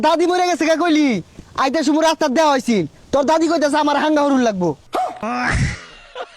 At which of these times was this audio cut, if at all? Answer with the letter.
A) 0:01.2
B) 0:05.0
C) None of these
B